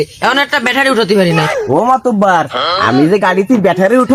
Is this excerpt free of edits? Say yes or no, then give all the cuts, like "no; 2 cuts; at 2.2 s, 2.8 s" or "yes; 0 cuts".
no; 1 cut; at 1.5 s